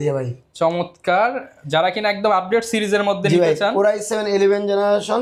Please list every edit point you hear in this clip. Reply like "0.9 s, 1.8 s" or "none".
none